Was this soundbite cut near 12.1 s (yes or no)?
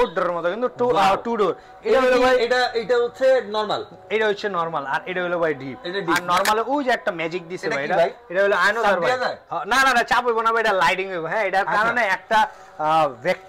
no